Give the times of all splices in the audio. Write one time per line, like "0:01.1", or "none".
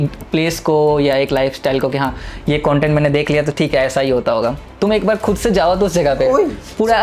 none

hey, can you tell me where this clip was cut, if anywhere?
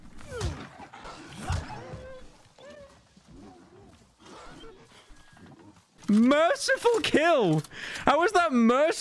0:01.0
0:06.0

